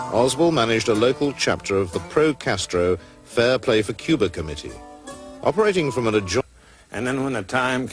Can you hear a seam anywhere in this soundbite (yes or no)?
no